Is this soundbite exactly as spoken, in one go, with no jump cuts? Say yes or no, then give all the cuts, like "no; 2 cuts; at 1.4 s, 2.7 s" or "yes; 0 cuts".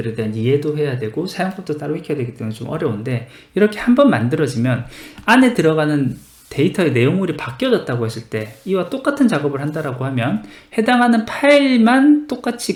yes; 0 cuts